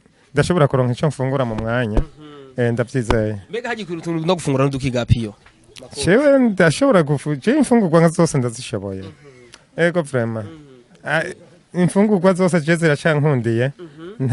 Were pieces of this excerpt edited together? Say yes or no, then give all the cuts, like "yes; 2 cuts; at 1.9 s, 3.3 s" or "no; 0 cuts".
no; 0 cuts